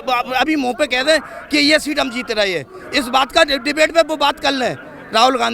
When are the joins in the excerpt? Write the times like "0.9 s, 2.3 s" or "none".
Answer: none